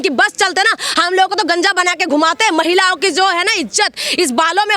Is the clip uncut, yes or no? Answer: yes